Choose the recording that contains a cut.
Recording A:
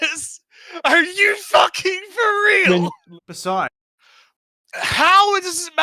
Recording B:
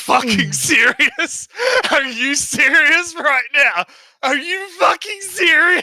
A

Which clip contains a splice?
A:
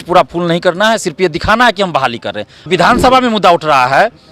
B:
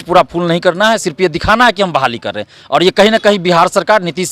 A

